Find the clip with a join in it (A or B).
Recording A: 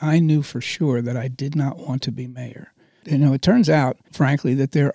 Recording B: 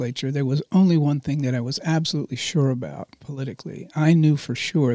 A